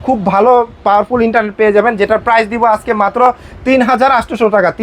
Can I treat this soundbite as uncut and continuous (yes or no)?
yes